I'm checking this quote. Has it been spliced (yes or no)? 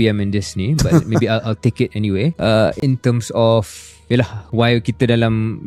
no